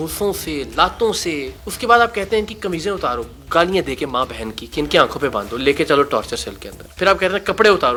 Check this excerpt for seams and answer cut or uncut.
uncut